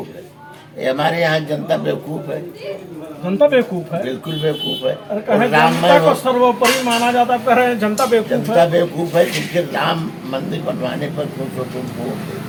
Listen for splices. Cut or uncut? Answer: uncut